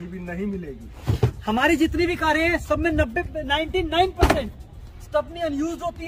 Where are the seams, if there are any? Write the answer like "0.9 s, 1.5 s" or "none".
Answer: 0.9 s